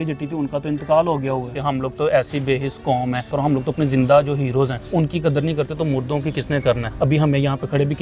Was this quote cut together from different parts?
yes; 4 cuts; at 1.5 s, 3.3 s, 4.8 s, 6.9 s

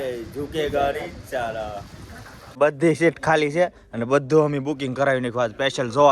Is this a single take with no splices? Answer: no; 1 cut; at 2.4 s

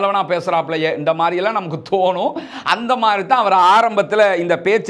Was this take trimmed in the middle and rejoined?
no; 0 cuts

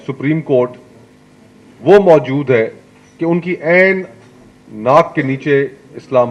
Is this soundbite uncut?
yes; 0 cuts

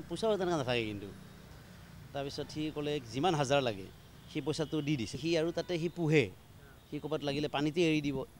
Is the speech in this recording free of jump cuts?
no; 1 cut; at 5.2 s

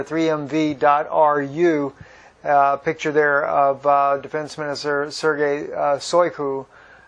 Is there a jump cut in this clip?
no; 0 cuts

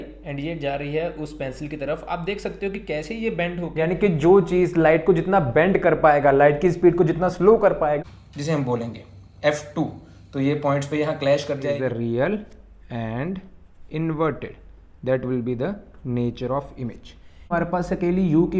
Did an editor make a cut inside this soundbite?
yes; 4 cuts; at 3.7 s, 8.0 s, 11.8 s, 17.5 s

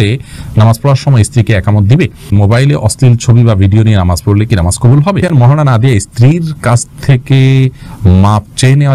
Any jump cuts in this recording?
yes; 2 cuts; at 2.3 s, 5.2 s

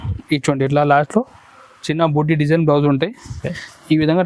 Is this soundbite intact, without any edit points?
yes; 0 cuts

